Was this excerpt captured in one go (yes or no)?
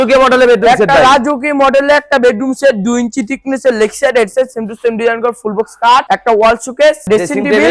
yes